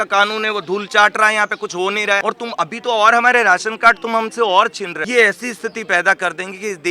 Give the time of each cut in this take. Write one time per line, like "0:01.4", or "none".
0:02.2
0:04.9